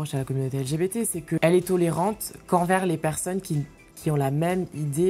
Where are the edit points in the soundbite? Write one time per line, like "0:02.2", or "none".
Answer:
0:01.4